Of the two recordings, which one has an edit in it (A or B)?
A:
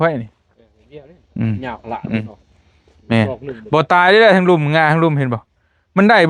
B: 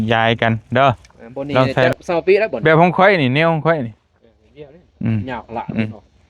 B